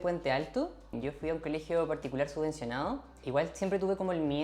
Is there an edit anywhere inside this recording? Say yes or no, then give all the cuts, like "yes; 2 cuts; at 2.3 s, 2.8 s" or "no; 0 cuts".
yes; 2 cuts; at 0.9 s, 3.2 s